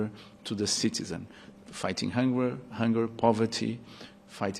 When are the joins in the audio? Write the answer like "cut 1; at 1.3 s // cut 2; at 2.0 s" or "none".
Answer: none